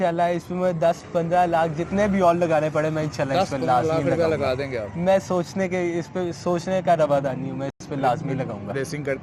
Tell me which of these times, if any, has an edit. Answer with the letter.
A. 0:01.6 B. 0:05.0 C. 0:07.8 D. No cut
D